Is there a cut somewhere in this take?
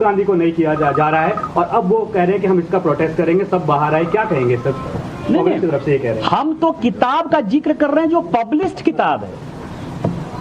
yes; 1 cut; at 6.9 s

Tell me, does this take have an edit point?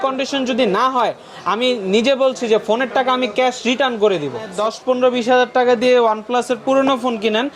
yes; 1 cut; at 4.5 s

